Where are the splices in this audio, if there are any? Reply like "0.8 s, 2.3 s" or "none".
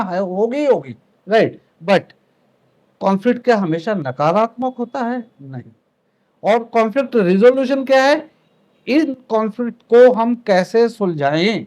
6.0 s